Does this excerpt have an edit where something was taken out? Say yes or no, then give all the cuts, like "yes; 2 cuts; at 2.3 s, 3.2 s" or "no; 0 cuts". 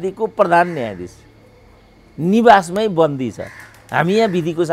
no; 0 cuts